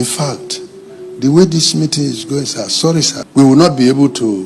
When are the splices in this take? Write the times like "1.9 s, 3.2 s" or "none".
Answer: 3.2 s